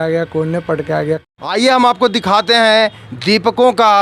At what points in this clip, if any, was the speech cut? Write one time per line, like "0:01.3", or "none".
0:01.2